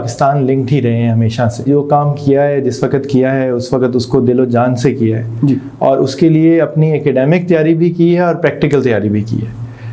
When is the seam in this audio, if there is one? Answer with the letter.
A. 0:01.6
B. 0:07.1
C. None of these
A